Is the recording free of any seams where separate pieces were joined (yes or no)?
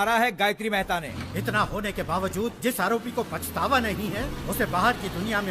no